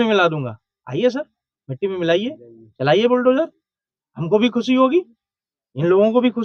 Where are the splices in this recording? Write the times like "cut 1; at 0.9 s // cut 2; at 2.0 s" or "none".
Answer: none